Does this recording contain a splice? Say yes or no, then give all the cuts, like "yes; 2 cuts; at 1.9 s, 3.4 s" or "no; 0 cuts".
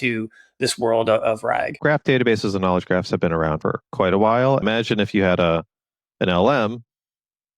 yes; 3 cuts; at 1.7 s, 3.6 s, 4.6 s